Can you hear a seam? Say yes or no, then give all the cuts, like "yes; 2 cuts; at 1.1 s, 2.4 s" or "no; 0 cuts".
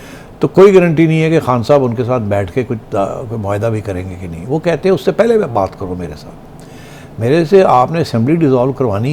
no; 0 cuts